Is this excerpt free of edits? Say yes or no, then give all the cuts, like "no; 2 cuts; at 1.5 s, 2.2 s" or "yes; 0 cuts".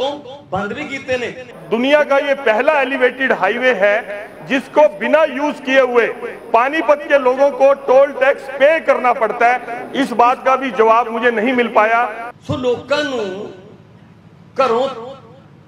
no; 2 cuts; at 1.5 s, 12.3 s